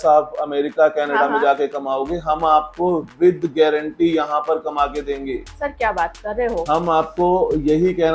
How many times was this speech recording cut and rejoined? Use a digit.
0